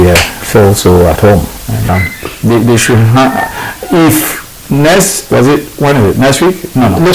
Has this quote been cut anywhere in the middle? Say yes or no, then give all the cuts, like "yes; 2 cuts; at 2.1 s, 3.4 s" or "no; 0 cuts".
yes; 1 cut; at 1.9 s